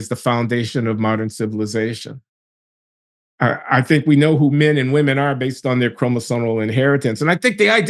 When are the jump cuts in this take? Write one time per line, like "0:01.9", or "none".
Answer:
none